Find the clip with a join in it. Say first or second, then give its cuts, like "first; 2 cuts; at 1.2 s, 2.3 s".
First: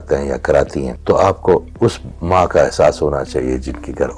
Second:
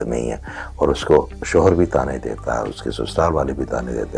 first; 1 cut; at 0.9 s